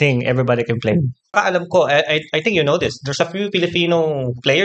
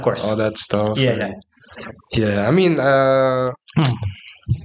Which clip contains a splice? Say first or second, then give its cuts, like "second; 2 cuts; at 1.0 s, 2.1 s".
first; 1 cut; at 1.3 s